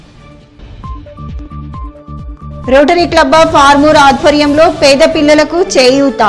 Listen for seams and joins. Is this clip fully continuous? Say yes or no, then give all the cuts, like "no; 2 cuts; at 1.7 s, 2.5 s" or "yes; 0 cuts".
no; 1 cut; at 1.3 s